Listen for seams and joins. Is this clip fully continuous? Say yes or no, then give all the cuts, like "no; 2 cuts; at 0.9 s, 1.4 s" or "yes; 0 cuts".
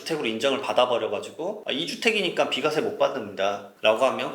no; 1 cut; at 1.6 s